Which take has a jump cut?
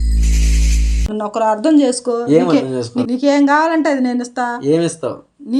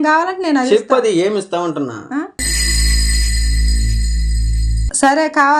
first; 2 cuts; at 1.0 s, 3.0 s

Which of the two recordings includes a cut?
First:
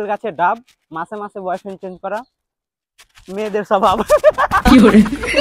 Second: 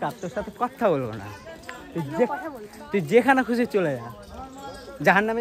first; 1 cut; at 4.3 s

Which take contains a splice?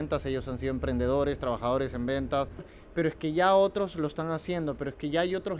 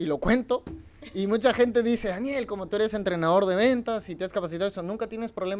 first; 1 cut; at 2.8 s

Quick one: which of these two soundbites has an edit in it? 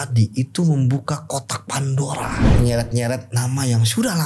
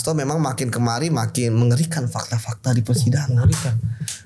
first; 1 cut; at 2.4 s

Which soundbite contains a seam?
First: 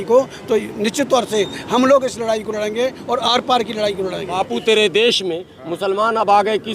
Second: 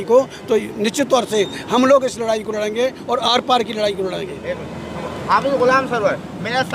first; 1 cut; at 4.4 s

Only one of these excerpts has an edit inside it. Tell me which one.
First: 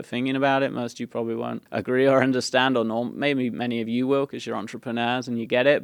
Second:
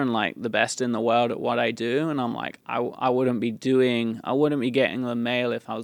first; 1 cut; at 1.6 s

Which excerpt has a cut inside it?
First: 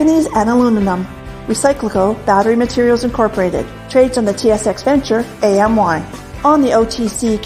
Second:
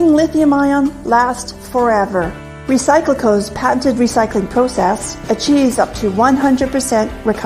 second; 1 cut; at 1.4 s

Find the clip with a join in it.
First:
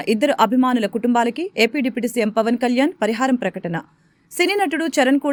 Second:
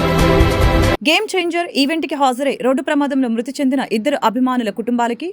second; 1 cut; at 0.9 s

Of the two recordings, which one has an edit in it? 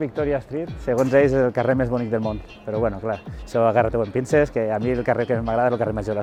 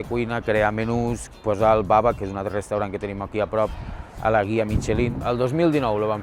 second; 2 cuts; at 1.3 s, 5.2 s

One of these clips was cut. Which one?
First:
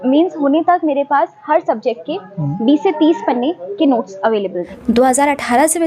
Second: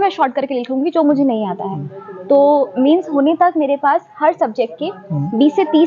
first; 1 cut; at 4.7 s

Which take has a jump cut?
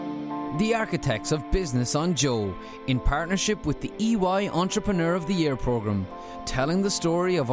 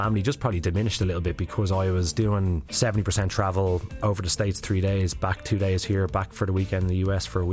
second; 2 cuts; at 2.7 s, 3.9 s

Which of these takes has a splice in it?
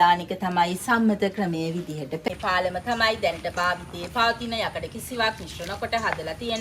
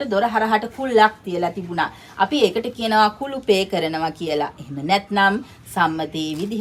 first; 1 cut; at 2.3 s

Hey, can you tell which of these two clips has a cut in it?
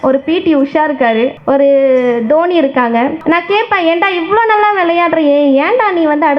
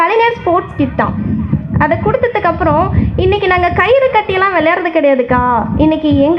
first; 2 cuts; at 1.4 s, 3.2 s

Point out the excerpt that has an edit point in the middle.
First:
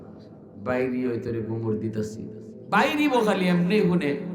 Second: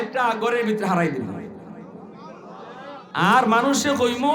second; 1 cut; at 3.0 s

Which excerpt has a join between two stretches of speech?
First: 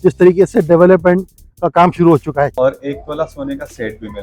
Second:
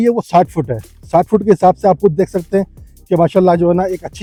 first; 1 cut; at 2.5 s

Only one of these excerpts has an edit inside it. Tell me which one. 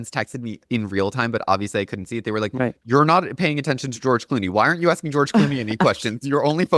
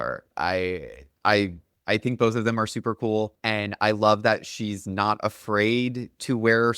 second; 2 cuts; at 1.7 s, 3.4 s

